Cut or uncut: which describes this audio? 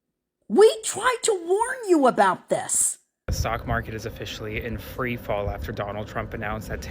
cut